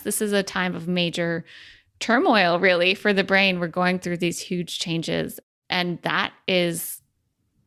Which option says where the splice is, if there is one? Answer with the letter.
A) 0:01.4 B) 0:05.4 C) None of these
B